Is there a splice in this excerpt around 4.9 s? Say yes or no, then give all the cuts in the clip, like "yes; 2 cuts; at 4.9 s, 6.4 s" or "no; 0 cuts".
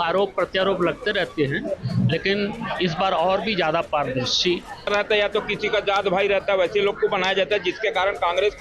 yes; 1 cut; at 4.9 s